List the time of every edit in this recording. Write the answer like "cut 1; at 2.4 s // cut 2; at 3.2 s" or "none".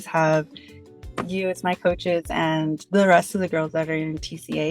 none